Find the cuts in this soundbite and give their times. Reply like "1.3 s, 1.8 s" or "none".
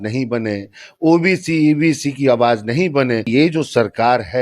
3.3 s